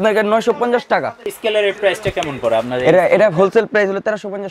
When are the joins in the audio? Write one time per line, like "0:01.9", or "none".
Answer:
0:01.3